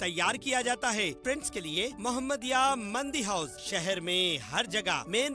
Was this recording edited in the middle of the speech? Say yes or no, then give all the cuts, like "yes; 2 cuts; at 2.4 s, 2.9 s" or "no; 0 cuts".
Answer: yes; 1 cut; at 1.2 s